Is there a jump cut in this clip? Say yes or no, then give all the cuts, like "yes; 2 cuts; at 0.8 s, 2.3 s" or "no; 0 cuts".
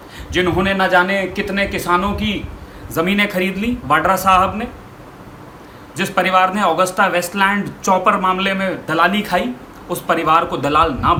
no; 0 cuts